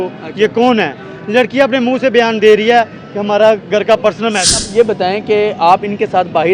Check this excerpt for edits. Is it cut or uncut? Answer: cut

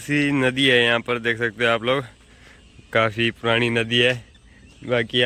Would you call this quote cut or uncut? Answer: uncut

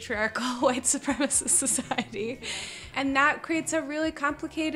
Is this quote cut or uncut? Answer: cut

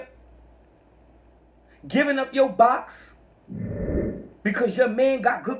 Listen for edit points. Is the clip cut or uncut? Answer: cut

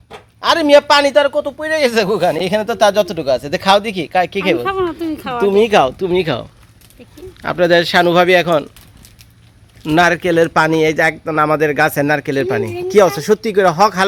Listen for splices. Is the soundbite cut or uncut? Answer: uncut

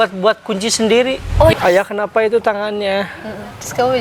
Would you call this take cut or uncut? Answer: cut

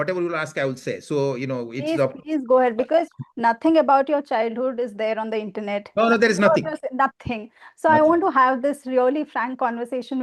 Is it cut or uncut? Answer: uncut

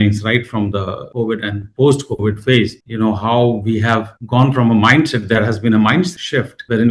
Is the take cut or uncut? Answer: uncut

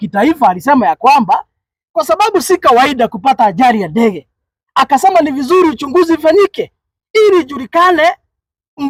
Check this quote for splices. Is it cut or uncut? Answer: uncut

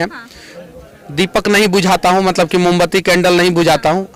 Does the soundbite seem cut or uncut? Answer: uncut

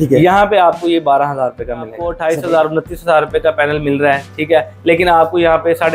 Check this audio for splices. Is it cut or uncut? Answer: cut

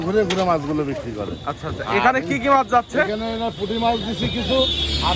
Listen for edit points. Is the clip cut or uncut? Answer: uncut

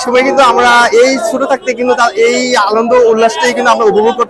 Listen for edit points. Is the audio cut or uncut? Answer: uncut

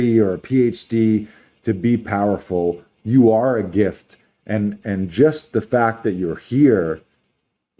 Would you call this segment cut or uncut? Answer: uncut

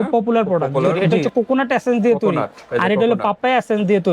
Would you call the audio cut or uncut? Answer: cut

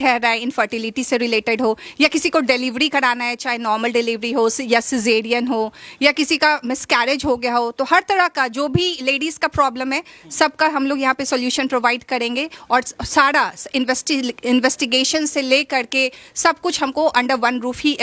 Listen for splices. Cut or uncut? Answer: uncut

